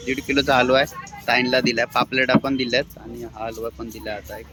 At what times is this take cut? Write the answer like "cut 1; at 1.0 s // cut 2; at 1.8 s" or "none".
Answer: none